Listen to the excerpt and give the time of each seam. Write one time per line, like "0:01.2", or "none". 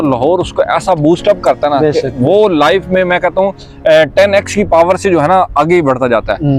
none